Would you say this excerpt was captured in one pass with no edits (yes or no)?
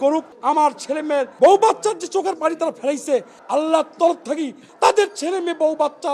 no